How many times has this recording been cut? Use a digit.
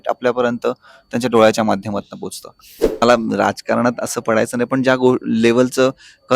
1